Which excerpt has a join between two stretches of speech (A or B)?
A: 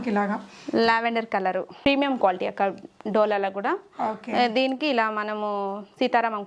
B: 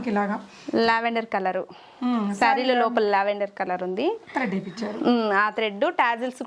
A